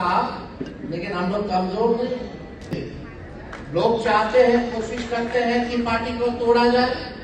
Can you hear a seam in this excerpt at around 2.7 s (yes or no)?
yes